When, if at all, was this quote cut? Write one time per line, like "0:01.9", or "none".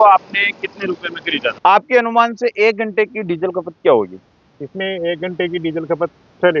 0:01.5